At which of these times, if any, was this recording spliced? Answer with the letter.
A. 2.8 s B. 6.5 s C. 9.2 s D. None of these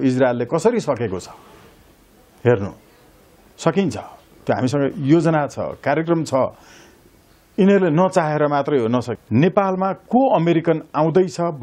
C